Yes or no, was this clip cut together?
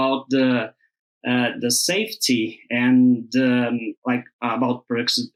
no